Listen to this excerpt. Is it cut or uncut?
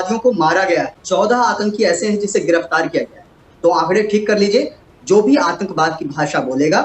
uncut